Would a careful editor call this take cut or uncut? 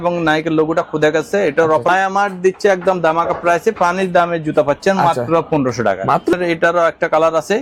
cut